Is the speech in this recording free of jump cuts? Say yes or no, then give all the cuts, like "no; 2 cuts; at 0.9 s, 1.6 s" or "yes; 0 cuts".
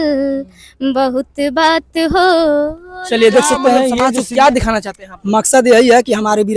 no; 1 cut; at 4.0 s